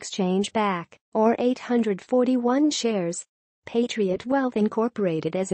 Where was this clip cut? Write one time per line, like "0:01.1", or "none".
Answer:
0:01.0